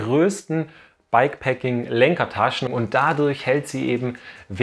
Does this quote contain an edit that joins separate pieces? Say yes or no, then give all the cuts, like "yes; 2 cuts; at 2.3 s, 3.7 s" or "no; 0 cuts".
yes; 1 cut; at 2.7 s